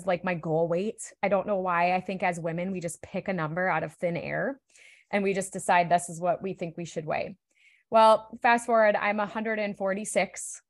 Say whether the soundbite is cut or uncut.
uncut